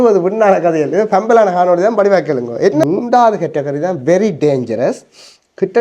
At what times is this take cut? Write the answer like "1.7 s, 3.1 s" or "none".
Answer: 2.8 s